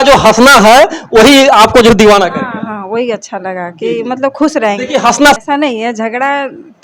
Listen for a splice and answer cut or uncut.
cut